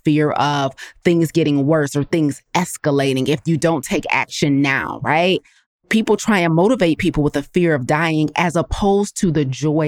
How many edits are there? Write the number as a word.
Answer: one